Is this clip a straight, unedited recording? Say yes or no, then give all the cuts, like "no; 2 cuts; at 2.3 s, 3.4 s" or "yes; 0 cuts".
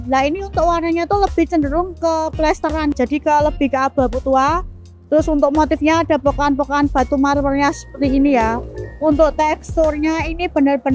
no; 1 cut; at 2.9 s